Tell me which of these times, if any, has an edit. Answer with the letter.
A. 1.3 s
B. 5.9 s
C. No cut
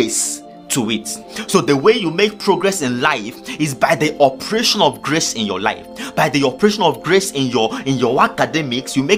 A